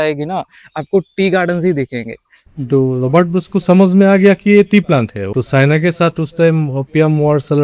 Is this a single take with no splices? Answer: no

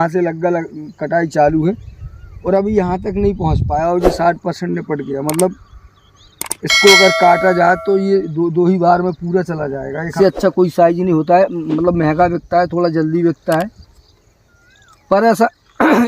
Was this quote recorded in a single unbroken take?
no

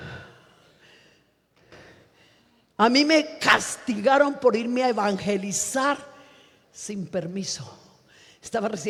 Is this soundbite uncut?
yes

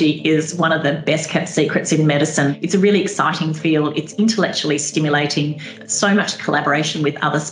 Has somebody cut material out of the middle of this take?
yes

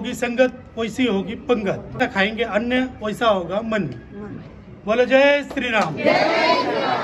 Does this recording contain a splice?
no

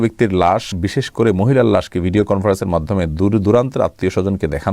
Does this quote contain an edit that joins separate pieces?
no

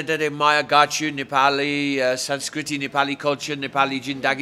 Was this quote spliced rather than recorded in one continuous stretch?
no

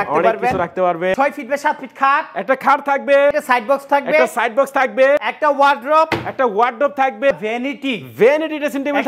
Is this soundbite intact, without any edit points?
no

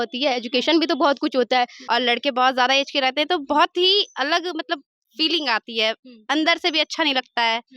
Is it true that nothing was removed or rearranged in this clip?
no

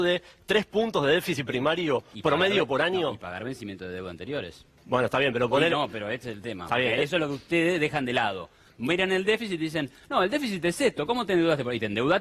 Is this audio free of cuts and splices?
yes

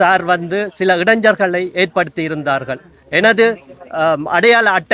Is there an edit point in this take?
no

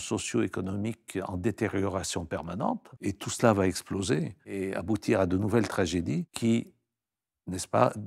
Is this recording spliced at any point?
yes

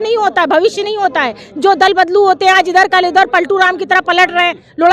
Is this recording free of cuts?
yes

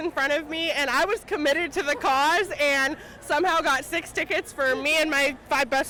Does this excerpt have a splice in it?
no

